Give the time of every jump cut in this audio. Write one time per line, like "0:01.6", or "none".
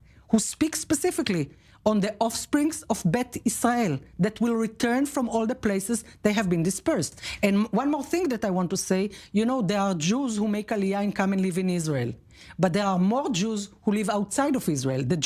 0:07.2